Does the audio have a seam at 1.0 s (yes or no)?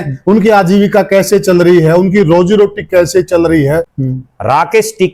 no